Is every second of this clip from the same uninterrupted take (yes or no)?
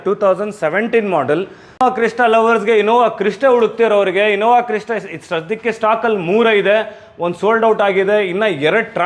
no